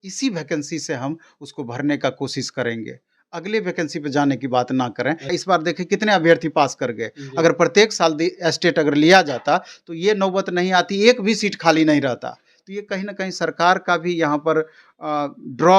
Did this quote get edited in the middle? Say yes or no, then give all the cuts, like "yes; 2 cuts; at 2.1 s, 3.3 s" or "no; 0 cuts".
yes; 1 cut; at 5.3 s